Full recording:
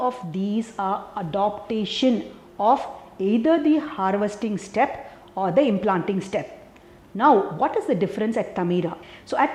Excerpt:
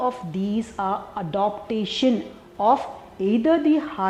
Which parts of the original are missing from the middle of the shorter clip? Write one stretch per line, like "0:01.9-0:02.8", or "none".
none